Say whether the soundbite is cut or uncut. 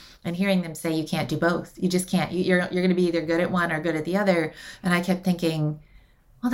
uncut